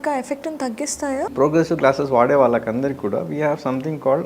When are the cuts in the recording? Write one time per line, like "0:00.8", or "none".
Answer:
0:01.3